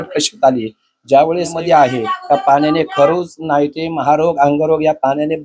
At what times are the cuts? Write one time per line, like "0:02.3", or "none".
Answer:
0:01.5